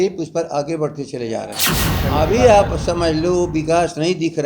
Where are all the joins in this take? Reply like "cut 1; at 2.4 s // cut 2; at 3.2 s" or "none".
cut 1; at 1.9 s